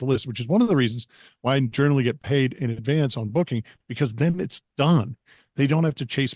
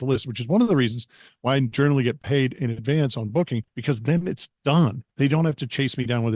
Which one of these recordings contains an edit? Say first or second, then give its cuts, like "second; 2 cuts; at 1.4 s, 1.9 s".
second; 2 cuts; at 3.7 s, 5.0 s